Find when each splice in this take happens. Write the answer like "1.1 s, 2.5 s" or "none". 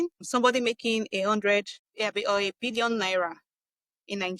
none